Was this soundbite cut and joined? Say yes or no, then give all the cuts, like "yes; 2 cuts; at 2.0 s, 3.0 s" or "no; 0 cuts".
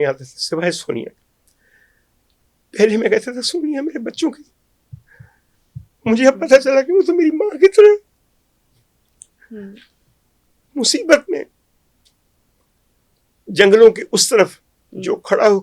no; 0 cuts